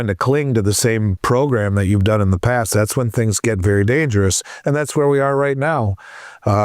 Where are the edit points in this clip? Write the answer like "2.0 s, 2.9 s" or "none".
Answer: 1.1 s